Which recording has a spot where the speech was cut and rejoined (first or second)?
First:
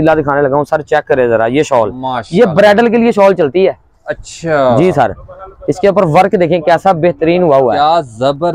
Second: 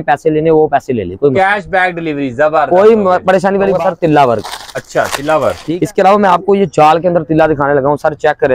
second